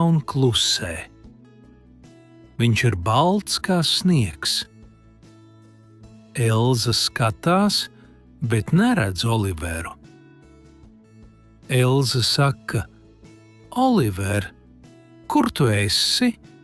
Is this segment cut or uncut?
uncut